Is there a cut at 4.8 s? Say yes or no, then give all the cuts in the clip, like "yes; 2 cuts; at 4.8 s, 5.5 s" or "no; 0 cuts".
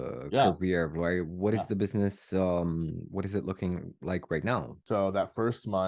yes; 1 cut; at 4.8 s